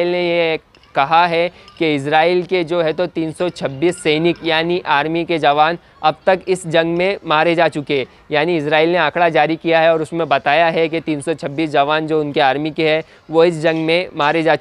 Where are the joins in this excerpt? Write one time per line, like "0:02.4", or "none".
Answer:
none